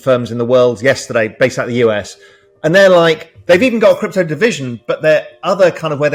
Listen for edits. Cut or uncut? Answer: uncut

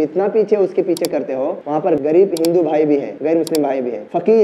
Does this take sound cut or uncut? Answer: cut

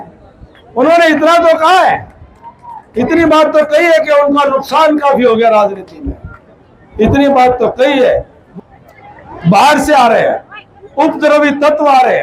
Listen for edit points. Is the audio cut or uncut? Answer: cut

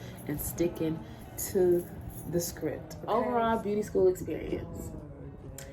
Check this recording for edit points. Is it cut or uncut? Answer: cut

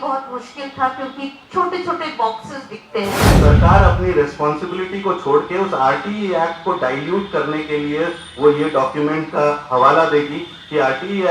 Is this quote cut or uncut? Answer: cut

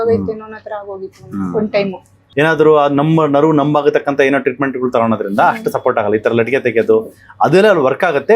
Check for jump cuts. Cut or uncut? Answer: cut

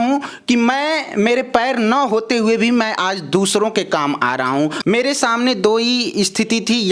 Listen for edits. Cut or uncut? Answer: cut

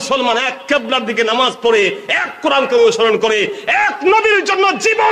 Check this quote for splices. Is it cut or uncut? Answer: uncut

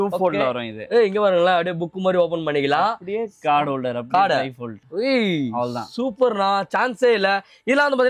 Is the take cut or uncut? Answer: uncut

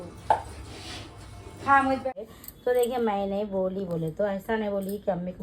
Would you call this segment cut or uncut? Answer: cut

